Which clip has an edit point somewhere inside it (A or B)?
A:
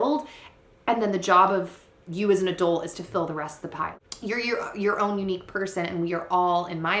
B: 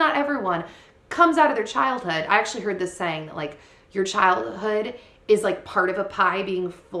A